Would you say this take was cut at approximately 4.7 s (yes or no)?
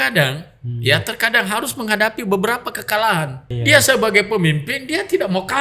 no